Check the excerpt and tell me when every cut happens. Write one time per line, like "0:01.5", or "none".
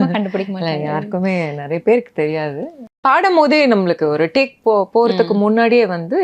0:03.0

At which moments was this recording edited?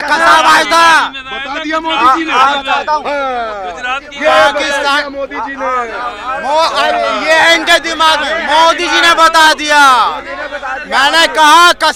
none

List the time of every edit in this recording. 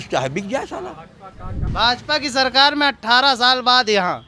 0:01.6

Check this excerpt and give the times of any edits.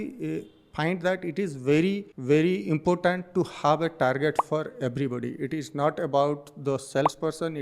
0:02.1

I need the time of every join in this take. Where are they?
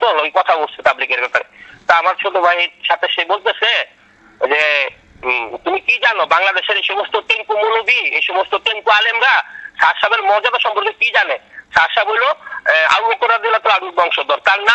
none

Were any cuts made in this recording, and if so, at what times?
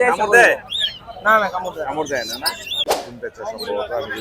0:03.0

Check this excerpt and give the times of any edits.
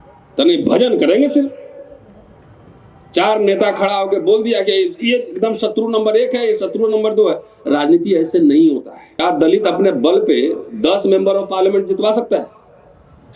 0:09.2

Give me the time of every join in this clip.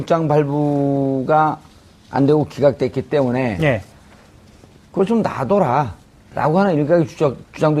none

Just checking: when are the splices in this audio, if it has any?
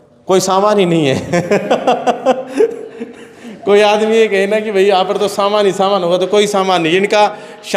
none

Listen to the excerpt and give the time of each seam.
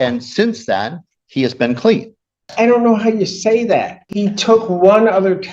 0:02.5
0:04.0

